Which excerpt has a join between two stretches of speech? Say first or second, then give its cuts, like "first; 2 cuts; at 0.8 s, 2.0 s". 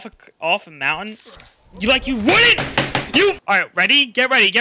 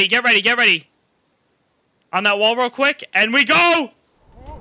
first; 1 cut; at 3.4 s